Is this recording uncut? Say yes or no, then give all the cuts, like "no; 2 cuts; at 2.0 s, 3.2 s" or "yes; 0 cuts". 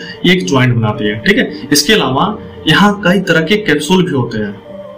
yes; 0 cuts